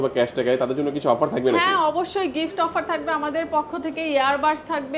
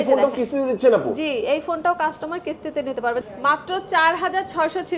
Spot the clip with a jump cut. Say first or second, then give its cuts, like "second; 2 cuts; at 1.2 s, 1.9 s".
second; 1 cut; at 3.2 s